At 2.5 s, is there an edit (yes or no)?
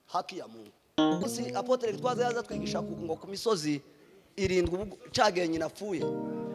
no